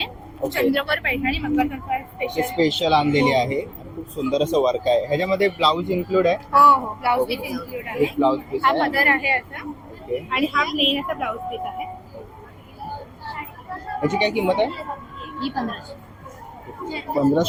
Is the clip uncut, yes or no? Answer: yes